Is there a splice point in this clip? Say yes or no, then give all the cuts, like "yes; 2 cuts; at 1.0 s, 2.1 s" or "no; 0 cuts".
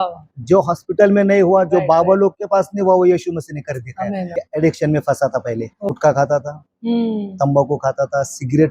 yes; 2 cuts; at 4.3 s, 5.9 s